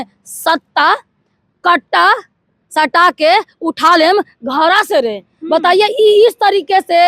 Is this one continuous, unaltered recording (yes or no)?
yes